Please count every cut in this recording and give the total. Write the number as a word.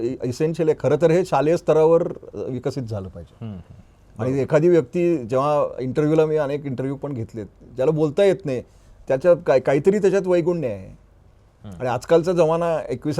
zero